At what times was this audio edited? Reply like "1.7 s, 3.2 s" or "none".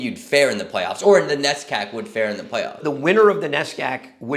2.8 s